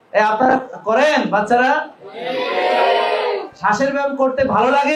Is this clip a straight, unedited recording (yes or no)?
yes